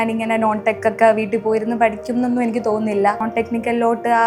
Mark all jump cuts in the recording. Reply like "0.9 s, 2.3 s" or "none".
3.2 s